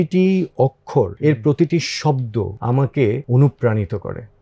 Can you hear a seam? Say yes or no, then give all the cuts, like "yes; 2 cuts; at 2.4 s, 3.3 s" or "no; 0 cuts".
yes; 3 cuts; at 1.1 s, 2.6 s, 3.2 s